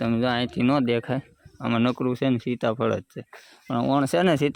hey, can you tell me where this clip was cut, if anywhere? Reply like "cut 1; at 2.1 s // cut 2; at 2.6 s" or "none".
none